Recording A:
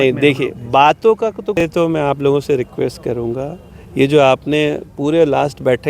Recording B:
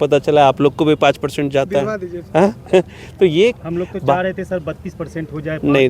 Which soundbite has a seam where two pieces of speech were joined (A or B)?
A